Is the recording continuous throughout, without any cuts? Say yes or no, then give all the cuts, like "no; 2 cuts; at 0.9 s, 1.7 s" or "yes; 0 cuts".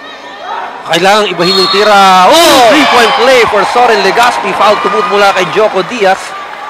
yes; 0 cuts